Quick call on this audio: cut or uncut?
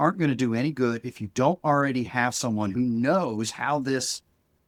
uncut